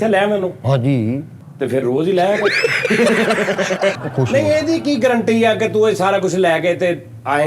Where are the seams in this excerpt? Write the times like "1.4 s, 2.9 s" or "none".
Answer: 1.4 s, 3.9 s